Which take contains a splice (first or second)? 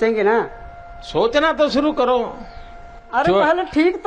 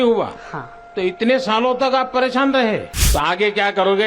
second